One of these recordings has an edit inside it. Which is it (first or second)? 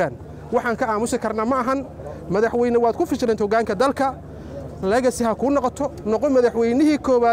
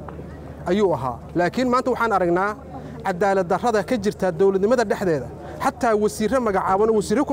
second